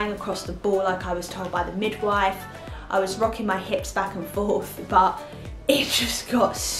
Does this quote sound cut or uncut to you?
uncut